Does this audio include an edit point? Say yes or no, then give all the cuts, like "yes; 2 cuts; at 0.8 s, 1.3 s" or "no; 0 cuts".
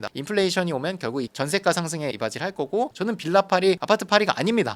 yes; 1 cut; at 2.9 s